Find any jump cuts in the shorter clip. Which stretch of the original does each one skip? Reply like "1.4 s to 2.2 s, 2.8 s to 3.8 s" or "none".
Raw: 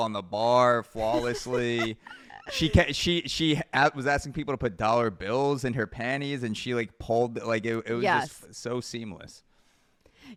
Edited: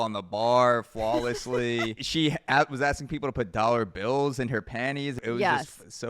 2.0 s to 3.3 s, 6.4 s to 7.8 s